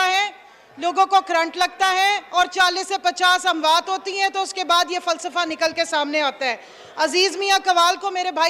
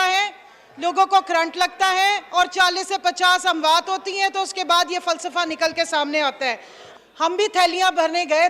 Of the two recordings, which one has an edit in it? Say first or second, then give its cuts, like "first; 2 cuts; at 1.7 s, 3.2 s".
second; 1 cut; at 6.8 s